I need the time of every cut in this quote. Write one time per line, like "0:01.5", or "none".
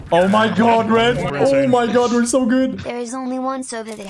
0:01.3
0:02.8